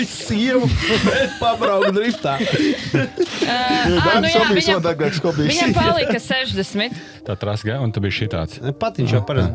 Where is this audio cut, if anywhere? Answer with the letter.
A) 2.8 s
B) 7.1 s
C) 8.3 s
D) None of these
B